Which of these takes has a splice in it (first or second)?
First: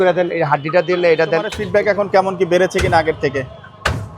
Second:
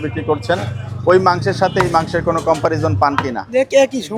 first